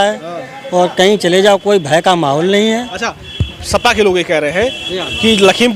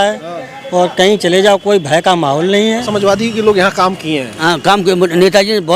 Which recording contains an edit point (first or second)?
second